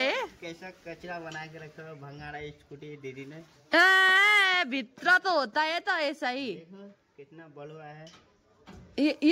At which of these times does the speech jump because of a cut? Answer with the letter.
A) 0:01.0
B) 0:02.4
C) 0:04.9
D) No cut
D